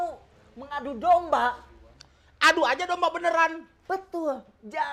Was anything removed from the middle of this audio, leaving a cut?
no; 0 cuts

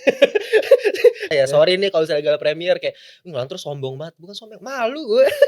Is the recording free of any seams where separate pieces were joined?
no; 1 cut; at 1.3 s

